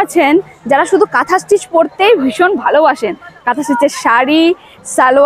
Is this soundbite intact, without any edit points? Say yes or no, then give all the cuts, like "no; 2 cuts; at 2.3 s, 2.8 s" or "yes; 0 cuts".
yes; 0 cuts